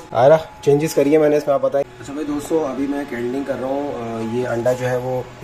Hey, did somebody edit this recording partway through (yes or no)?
yes